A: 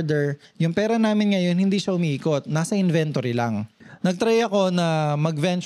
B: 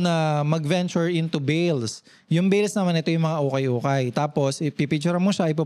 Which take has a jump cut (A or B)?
A